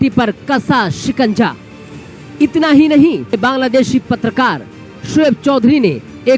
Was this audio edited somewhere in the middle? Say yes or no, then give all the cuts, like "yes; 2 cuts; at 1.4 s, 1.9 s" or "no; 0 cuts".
yes; 1 cut; at 3.4 s